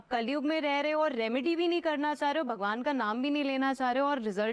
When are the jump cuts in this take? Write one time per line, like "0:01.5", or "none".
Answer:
none